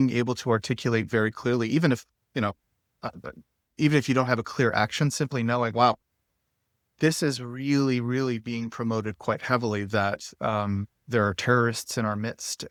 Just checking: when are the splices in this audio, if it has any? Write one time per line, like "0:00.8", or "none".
none